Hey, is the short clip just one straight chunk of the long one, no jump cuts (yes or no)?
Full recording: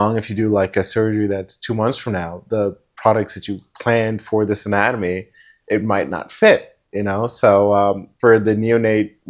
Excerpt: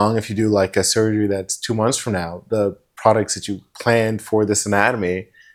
yes